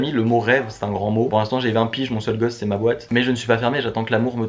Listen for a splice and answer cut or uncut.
uncut